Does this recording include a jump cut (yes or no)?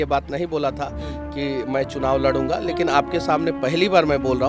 no